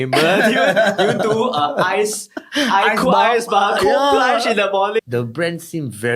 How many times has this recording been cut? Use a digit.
1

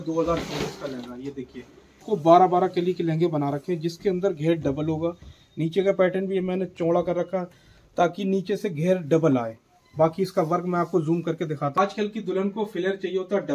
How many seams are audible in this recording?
2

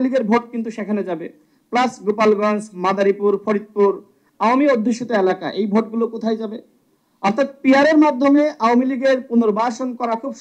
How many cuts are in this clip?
0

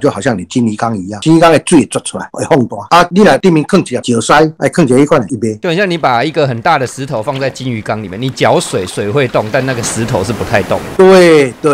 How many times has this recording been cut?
4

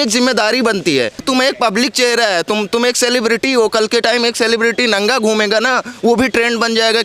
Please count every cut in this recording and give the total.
1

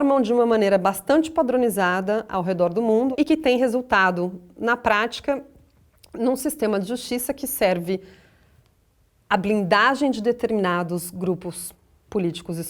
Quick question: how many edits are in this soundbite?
1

